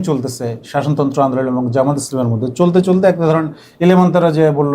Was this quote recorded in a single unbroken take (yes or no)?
yes